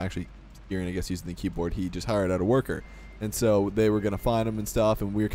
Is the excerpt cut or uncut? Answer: uncut